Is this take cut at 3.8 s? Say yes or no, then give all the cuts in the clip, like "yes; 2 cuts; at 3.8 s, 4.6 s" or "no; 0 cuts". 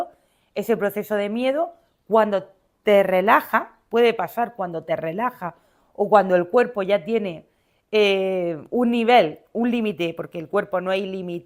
no; 0 cuts